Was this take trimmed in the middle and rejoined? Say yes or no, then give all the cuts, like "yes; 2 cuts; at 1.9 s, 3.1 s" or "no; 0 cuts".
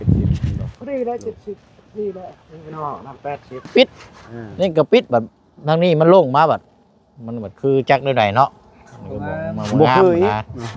yes; 1 cut; at 3.7 s